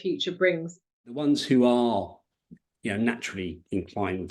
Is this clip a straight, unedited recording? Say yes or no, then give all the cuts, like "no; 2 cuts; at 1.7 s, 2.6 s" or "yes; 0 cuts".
no; 1 cut; at 1.2 s